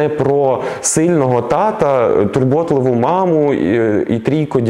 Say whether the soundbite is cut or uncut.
uncut